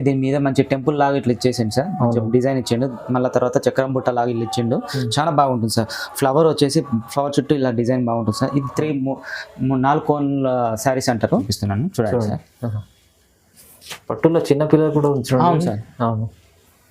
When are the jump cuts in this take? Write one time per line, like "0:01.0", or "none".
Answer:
0:11.5